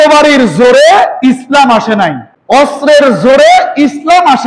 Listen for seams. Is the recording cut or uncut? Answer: cut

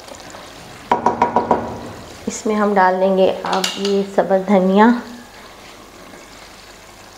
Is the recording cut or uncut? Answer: uncut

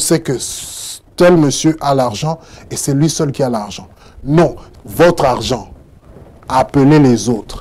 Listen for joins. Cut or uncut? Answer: cut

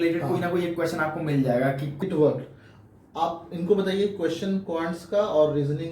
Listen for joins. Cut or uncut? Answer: cut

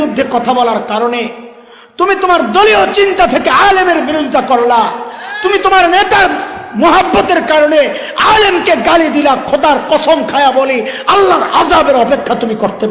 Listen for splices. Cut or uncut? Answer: uncut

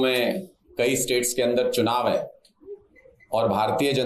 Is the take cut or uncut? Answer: uncut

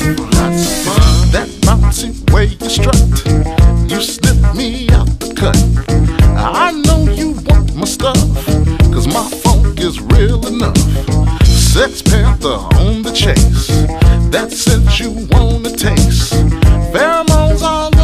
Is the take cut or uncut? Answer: uncut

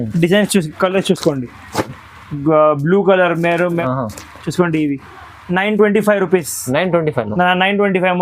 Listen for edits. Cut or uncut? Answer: cut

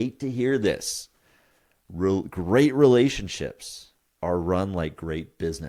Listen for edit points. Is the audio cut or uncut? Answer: uncut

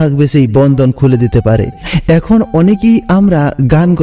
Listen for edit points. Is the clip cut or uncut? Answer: cut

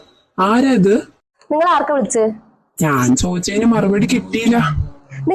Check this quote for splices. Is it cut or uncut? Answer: uncut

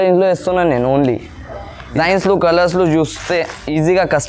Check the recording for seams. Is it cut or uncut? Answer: cut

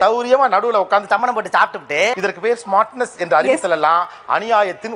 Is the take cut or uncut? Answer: uncut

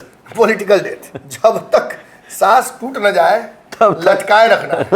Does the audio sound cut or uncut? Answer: uncut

